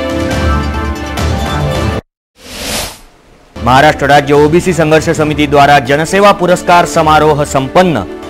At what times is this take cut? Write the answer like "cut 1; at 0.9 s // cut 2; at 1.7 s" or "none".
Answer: cut 1; at 1.1 s